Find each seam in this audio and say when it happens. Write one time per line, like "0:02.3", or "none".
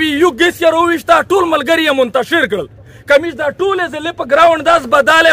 none